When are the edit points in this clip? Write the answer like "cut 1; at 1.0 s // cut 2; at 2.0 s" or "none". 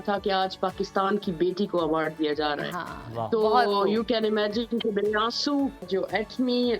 cut 1; at 5.9 s

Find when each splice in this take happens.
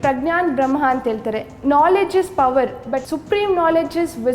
cut 1; at 3.1 s

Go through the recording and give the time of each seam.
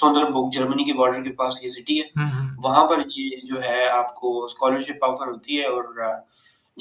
none

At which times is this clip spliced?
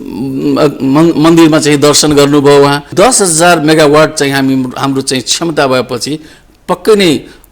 cut 1; at 2.9 s

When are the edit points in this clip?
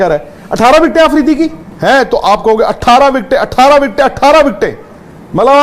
cut 1; at 1.7 s

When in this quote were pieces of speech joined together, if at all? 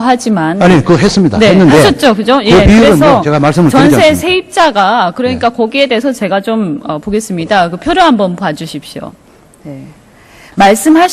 cut 1; at 5.5 s

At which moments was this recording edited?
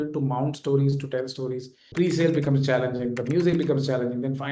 cut 1; at 1.9 s

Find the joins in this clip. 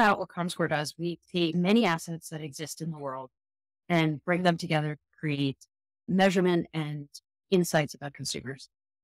cut 1; at 1.5 s

